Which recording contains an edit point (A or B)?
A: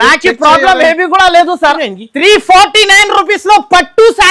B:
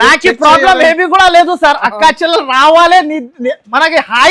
A